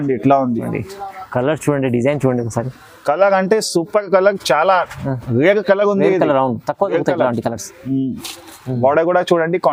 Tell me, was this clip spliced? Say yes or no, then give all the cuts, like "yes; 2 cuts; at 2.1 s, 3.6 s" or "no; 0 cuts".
no; 0 cuts